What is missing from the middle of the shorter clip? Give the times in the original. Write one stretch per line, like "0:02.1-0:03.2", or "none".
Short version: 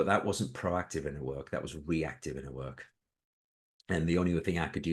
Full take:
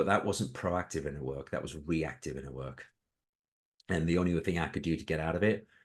none